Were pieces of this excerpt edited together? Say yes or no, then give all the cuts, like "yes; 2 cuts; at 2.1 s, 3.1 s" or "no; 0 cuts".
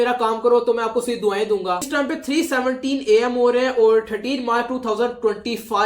yes; 1 cut; at 1.9 s